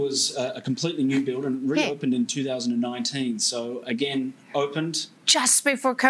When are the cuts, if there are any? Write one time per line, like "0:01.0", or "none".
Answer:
none